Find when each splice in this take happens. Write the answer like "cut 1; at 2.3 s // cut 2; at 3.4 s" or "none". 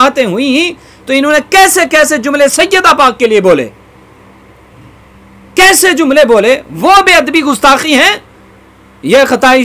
none